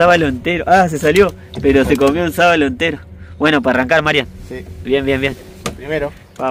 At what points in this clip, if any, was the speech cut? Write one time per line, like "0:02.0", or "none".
none